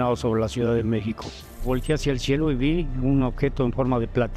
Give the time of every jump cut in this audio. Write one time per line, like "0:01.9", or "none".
0:01.6